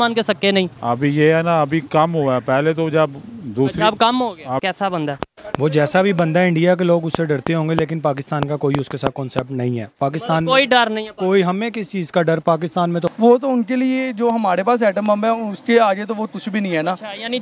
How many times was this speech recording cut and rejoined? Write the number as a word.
two